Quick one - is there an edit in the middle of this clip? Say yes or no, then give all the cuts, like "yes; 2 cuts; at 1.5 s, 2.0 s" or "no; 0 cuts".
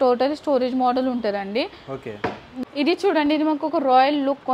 yes; 1 cut; at 2.5 s